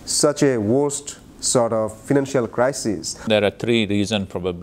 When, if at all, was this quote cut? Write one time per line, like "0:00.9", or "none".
0:03.2